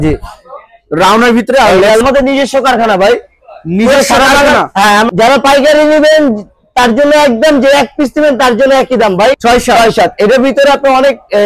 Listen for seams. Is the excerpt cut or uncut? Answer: cut